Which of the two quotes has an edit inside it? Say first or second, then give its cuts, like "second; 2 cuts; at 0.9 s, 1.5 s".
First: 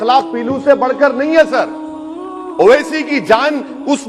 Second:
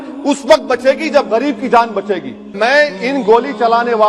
second; 1 cut; at 2.5 s